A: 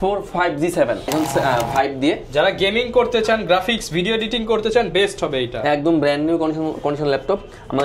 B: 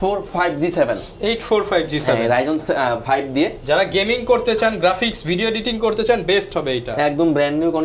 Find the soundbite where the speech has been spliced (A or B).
A